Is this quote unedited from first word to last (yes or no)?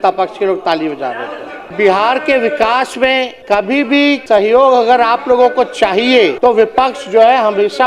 no